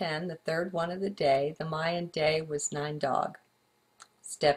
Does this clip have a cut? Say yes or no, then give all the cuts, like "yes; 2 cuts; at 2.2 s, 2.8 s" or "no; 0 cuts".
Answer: yes; 1 cut; at 2.1 s